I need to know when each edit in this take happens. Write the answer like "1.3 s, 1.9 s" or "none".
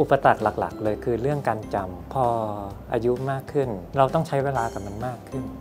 2.1 s, 3.9 s